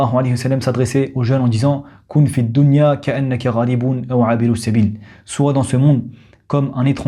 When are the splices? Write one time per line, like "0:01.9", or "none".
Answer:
none